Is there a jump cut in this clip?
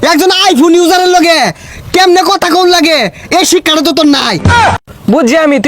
yes; 1 cut; at 4.8 s

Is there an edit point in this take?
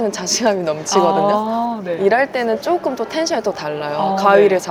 no; 0 cuts

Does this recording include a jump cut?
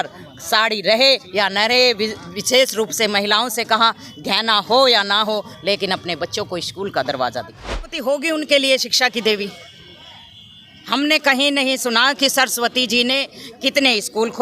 yes; 1 cut; at 8.0 s

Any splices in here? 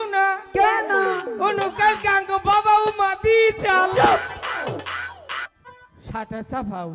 yes; 1 cut; at 5.5 s

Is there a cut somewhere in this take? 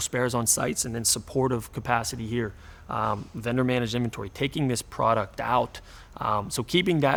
no; 0 cuts

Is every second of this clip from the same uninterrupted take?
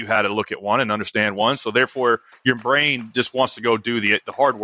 yes; 0 cuts

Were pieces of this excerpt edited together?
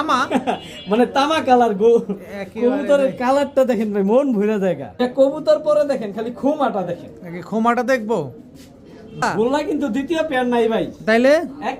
yes; 2 cuts; at 5.0 s, 9.2 s

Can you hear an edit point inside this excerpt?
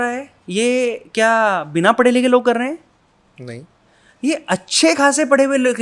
no; 0 cuts

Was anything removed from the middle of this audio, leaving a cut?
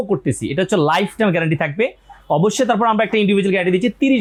no; 0 cuts

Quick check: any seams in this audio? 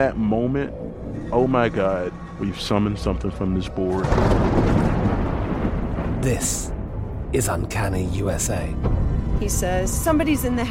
no; 0 cuts

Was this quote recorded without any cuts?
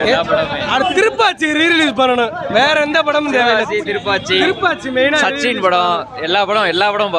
yes; 0 cuts

